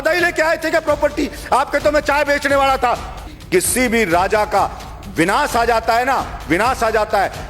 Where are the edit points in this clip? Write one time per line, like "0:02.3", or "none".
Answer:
0:03.3

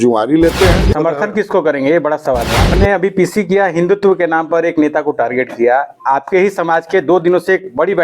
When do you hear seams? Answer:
0:00.8
0:02.6

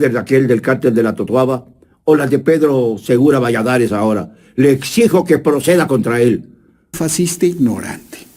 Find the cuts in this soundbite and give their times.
0:07.0

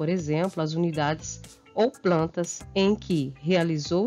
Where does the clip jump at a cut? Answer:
0:02.6

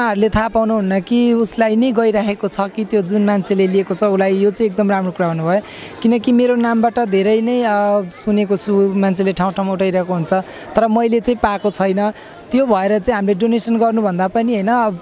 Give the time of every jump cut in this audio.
none

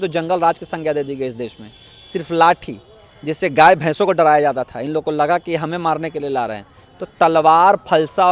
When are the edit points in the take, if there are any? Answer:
none

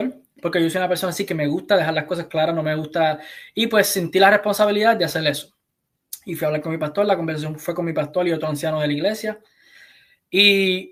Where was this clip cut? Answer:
none

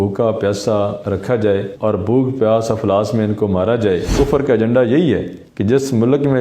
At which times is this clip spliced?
0:04.1

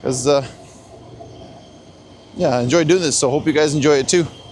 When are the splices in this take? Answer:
none

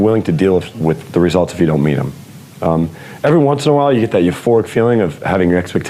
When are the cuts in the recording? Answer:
none

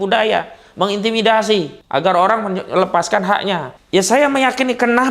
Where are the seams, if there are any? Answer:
0:01.8
0:03.7

